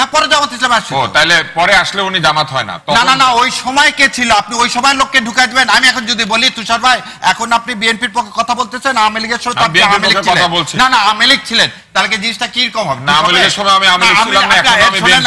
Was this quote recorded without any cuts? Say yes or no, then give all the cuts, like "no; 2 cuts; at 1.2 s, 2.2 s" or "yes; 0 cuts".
yes; 0 cuts